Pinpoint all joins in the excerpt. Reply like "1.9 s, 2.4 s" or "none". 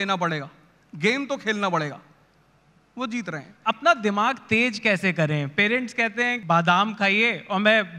3.5 s, 6.4 s

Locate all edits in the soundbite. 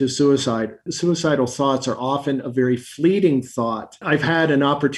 3.9 s

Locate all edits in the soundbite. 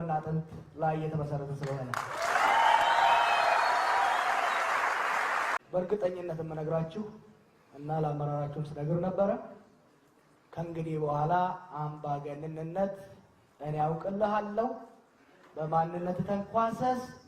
5.6 s

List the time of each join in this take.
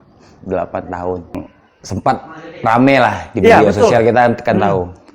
1.5 s

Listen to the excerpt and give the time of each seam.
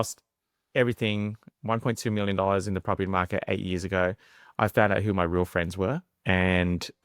6.1 s

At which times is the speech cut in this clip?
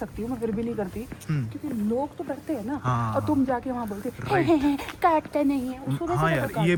none

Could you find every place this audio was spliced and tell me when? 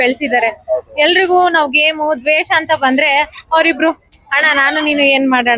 none

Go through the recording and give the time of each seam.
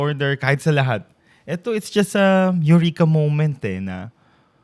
none

